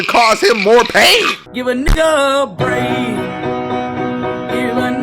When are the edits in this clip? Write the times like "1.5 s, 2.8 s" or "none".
1.4 s